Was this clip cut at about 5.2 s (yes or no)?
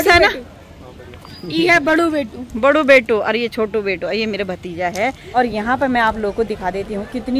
yes